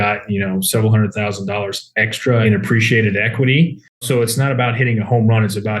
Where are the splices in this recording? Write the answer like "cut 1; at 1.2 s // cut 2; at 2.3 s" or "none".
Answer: cut 1; at 2.4 s // cut 2; at 4.0 s